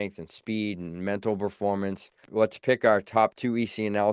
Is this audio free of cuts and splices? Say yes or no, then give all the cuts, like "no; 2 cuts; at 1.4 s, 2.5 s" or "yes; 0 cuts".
no; 1 cut; at 2.2 s